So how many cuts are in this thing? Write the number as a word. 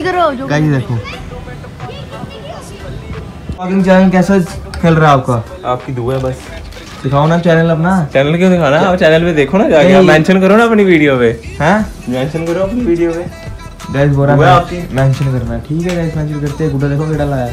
two